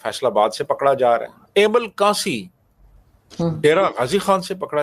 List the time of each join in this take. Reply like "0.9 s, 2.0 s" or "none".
1.4 s